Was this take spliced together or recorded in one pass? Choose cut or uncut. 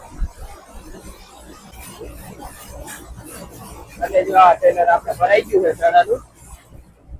cut